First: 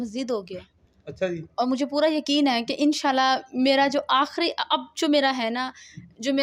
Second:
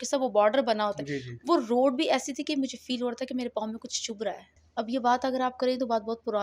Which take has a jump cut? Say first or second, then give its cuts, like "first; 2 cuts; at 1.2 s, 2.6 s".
second; 1 cut; at 4.5 s